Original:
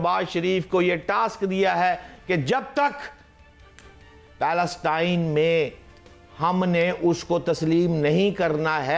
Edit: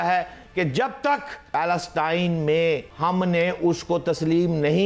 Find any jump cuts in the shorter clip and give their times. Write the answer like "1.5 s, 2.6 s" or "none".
1.4 s, 2.9 s